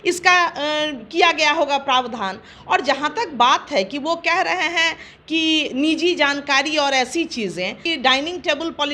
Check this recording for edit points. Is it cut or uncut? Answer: cut